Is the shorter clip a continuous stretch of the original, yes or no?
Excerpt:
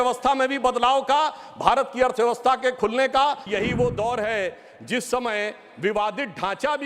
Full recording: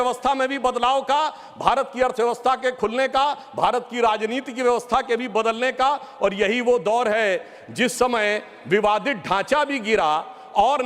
no